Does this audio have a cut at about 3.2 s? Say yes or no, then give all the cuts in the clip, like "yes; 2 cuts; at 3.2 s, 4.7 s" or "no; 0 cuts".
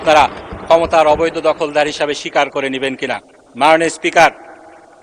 no; 0 cuts